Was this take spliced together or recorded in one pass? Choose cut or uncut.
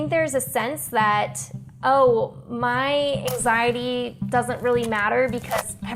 uncut